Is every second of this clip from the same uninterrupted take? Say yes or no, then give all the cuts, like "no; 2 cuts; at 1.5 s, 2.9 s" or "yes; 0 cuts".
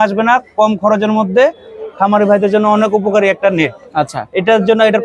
yes; 0 cuts